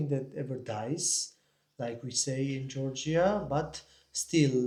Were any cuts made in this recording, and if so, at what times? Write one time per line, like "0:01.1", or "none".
none